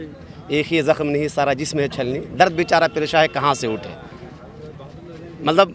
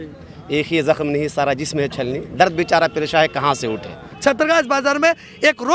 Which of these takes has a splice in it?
second; 1 cut; at 4.1 s

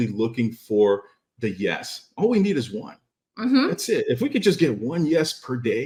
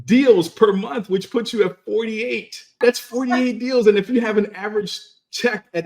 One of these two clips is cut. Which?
second; 1 cut; at 2.8 s

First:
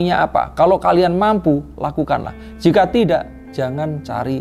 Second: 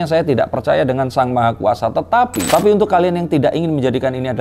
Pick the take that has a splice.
second; 1 cut; at 2.4 s

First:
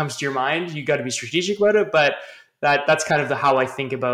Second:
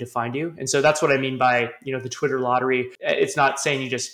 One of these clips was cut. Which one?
second; 1 cut; at 2.9 s

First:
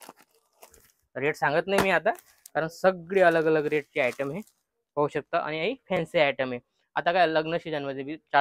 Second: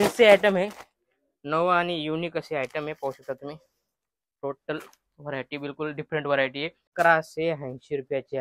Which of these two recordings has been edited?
second; 1 cut; at 6.8 s

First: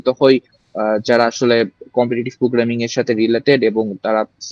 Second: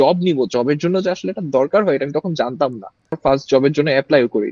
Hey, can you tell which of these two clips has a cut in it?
second; 1 cut; at 3.1 s

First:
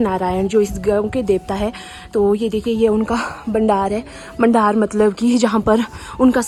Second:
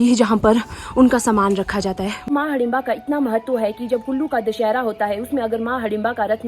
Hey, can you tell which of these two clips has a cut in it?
second; 1 cut; at 2.2 s

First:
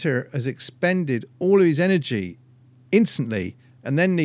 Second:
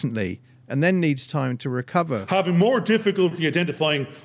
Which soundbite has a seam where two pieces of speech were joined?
second; 1 cut; at 2.2 s

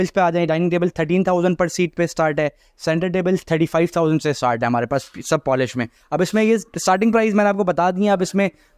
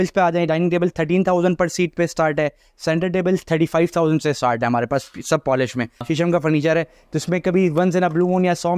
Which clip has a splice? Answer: second; 1 cut; at 5.9 s

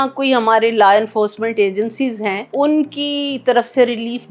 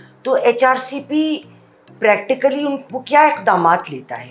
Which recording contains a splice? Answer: first; 1 cut; at 2.4 s

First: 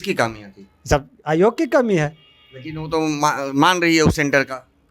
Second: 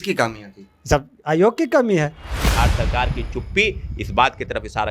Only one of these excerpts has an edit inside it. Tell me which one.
second; 1 cut; at 2.4 s

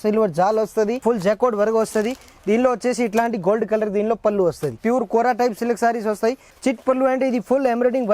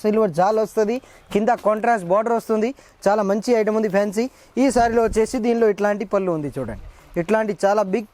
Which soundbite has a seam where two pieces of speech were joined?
first; 3 cuts; at 1.0 s, 4.8 s, 6.5 s

